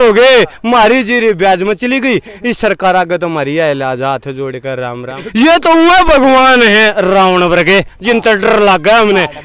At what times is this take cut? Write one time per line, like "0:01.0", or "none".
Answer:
0:05.2